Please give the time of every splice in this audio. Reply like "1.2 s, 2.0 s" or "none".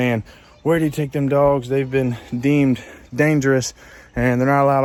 none